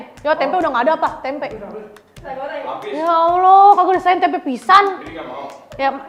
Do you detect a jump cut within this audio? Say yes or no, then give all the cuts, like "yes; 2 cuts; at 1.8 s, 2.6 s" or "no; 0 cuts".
no; 0 cuts